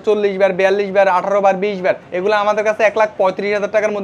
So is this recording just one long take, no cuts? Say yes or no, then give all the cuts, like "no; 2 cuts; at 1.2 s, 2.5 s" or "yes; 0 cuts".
no; 1 cut; at 2.1 s